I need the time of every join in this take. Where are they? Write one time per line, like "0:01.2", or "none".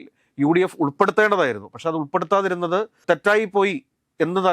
0:03.0